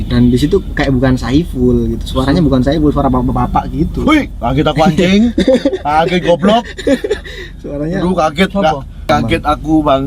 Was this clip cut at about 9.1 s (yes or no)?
yes